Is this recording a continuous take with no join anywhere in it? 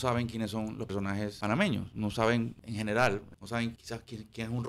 no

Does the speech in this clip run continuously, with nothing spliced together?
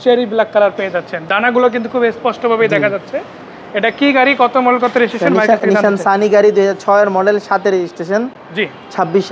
yes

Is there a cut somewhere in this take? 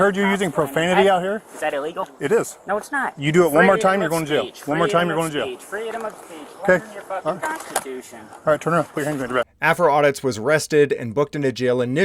no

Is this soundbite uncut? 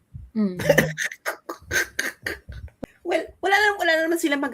no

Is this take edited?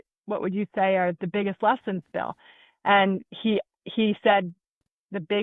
no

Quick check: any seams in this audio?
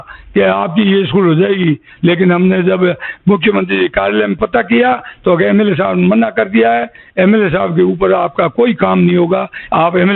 no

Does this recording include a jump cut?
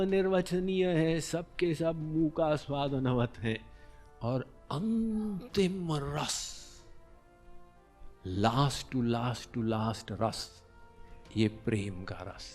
no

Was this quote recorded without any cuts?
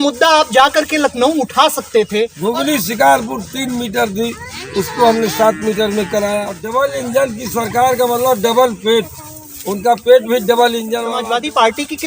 no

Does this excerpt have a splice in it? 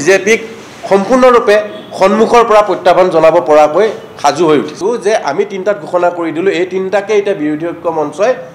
yes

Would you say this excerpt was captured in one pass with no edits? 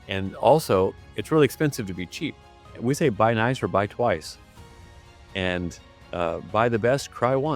no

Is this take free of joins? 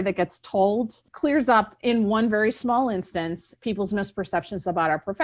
no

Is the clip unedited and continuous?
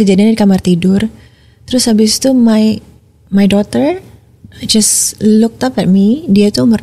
yes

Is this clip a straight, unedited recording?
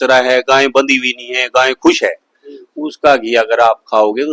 yes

